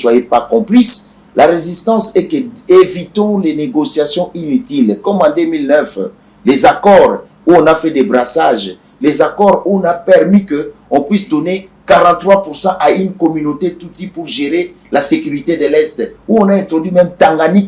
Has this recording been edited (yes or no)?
no